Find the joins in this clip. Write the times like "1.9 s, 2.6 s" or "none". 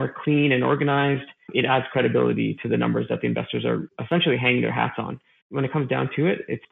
1.3 s, 5.5 s

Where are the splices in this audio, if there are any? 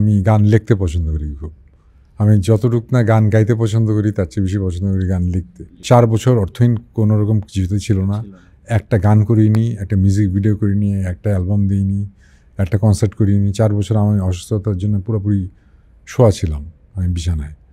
5.8 s

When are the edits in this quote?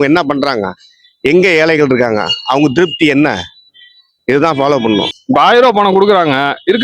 5.2 s

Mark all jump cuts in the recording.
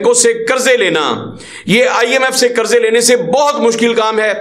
none

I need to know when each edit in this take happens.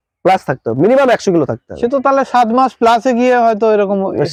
none

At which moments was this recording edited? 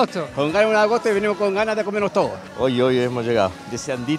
2.5 s

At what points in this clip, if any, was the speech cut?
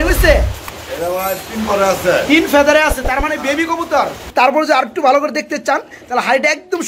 4.2 s

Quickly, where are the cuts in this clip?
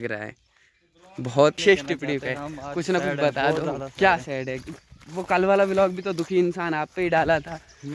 1.6 s

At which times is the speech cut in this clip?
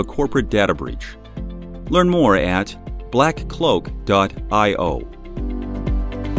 5.2 s

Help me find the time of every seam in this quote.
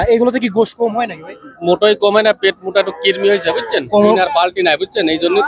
3.9 s

